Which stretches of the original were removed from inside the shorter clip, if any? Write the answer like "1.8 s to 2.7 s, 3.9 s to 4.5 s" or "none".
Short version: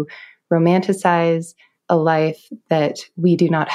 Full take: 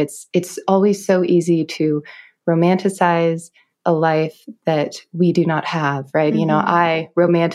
none